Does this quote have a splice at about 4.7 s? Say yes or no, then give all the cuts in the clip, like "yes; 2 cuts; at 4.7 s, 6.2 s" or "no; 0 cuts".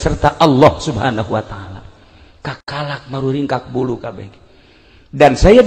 no; 0 cuts